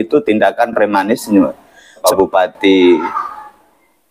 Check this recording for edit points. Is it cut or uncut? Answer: cut